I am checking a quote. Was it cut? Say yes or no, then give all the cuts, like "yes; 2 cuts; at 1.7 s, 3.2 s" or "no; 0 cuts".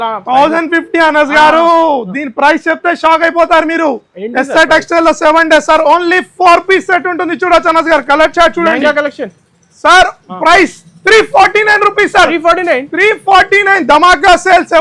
no; 0 cuts